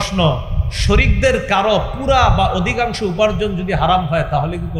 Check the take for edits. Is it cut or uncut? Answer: uncut